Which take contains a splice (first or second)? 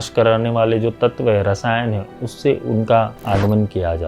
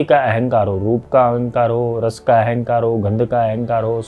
first